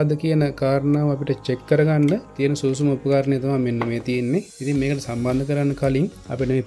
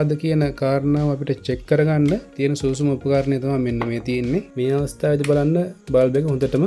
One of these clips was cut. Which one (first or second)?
second